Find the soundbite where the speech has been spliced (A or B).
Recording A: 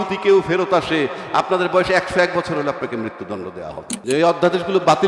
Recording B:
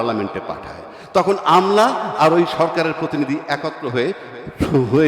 A